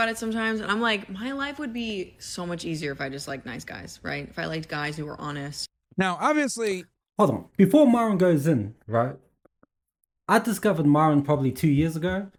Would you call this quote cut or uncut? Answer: uncut